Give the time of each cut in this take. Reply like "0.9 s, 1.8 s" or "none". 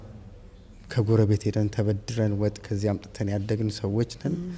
none